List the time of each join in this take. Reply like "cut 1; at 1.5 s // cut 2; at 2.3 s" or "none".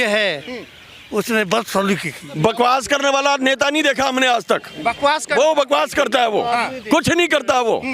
cut 1; at 2.2 s

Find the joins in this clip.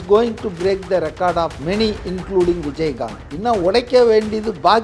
cut 1; at 1.6 s // cut 2; at 3.2 s

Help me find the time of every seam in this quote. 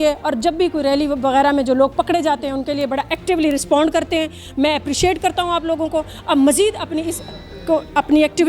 none

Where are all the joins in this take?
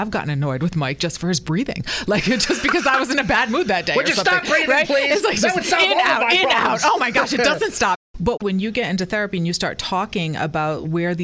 cut 1; at 8.4 s

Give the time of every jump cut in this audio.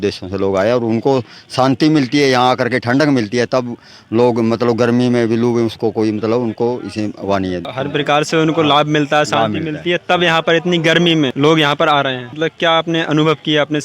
cut 1; at 7.7 s // cut 2; at 11.3 s // cut 3; at 12.3 s

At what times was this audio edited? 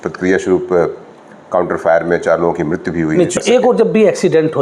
cut 1; at 3.4 s

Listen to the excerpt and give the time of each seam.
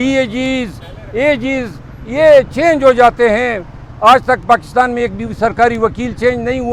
none

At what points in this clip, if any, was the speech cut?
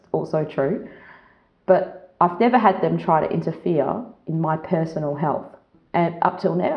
cut 1; at 5.7 s

